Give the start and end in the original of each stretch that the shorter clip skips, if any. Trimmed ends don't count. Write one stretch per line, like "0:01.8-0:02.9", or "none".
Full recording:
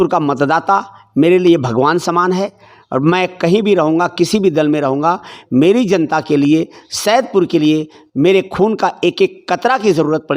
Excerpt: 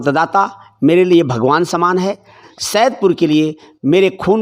0:02.8-0:06.8